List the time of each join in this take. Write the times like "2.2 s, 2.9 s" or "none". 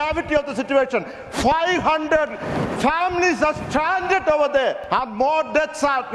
4.8 s